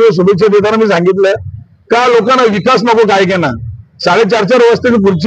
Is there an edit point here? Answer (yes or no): no